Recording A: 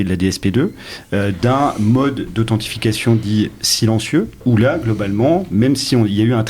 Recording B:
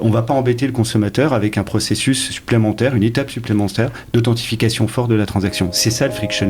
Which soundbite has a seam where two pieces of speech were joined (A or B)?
A